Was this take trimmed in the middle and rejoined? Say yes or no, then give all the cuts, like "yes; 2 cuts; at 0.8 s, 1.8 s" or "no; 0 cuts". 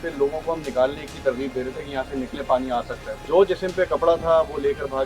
yes; 1 cut; at 3.0 s